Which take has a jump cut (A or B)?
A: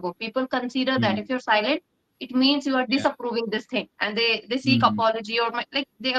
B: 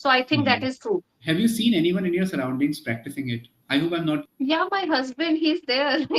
B